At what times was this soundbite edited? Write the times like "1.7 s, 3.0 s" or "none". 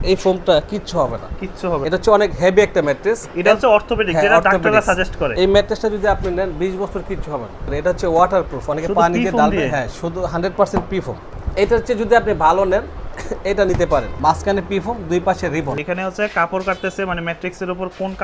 1.8 s, 5.3 s, 7.7 s, 11.4 s, 14.2 s, 15.8 s